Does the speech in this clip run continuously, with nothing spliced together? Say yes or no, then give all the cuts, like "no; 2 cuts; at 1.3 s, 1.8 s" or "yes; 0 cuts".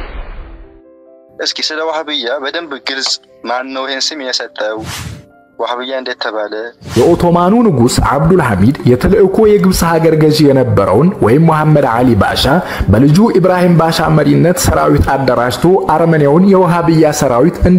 no; 2 cuts; at 1.2 s, 7.0 s